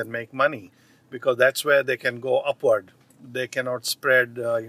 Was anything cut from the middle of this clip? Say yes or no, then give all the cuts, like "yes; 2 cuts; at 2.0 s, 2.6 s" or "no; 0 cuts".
no; 0 cuts